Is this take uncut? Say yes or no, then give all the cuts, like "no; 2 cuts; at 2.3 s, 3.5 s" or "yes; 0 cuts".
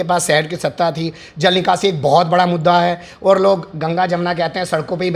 yes; 0 cuts